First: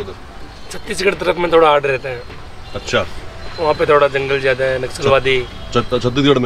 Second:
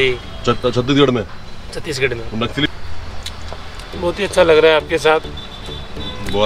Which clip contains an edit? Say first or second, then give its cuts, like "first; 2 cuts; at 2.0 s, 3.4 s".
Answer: second; 1 cut; at 2.7 s